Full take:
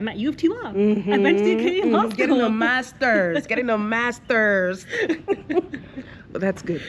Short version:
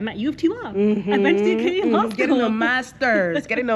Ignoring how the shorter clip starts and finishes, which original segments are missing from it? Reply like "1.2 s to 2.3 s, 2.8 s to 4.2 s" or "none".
none